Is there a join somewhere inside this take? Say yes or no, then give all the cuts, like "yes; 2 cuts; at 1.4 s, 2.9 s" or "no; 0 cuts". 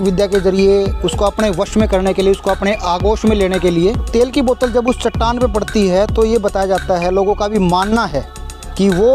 yes; 1 cut; at 4.1 s